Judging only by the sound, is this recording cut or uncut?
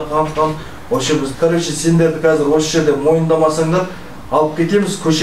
cut